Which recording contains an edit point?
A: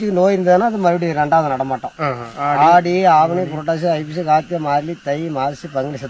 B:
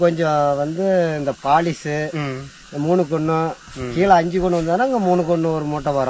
A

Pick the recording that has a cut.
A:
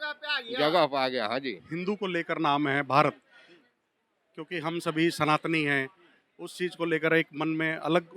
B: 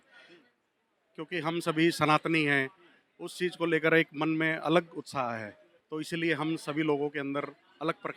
A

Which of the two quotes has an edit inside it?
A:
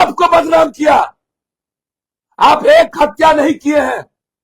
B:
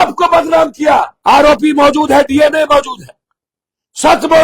B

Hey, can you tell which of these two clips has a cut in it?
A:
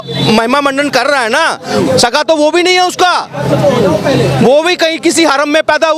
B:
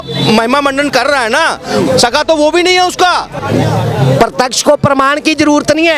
B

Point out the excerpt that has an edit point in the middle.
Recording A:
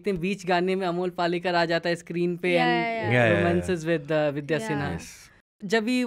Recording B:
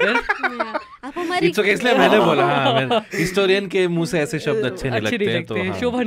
A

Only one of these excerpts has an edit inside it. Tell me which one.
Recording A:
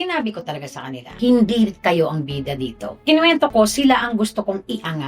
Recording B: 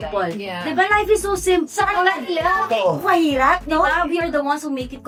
A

